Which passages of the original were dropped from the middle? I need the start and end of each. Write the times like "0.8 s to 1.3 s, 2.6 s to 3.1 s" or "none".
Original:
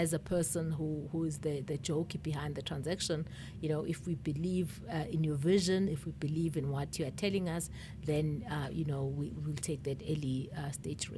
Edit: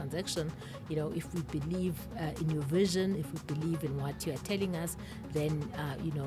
none